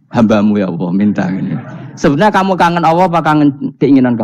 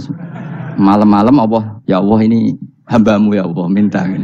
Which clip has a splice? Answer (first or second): second